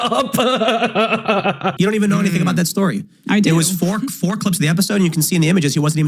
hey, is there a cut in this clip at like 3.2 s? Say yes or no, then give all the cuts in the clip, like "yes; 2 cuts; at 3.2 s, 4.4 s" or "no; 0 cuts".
no; 1 cut; at 1.7 s